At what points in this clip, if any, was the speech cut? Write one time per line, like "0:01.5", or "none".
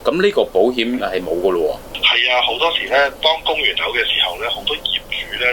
none